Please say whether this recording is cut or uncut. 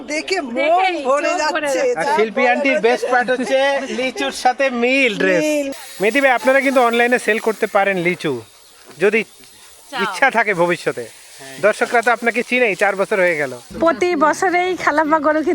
cut